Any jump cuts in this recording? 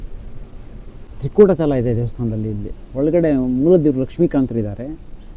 yes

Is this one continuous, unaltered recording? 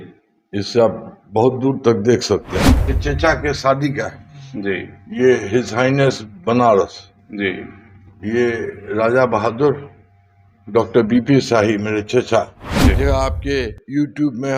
no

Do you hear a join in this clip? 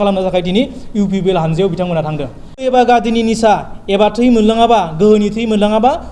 yes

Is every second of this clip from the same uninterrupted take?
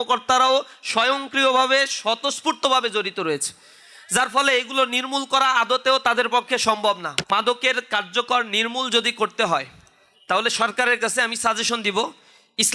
no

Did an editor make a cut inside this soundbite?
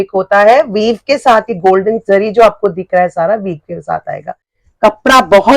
yes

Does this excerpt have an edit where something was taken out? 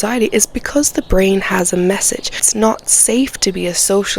yes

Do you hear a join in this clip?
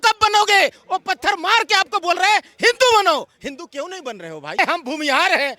yes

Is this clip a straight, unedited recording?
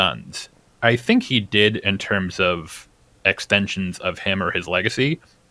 yes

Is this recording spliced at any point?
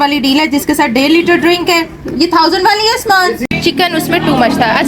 yes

